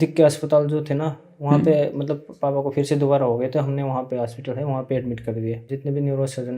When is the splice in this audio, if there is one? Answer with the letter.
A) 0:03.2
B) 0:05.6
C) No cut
B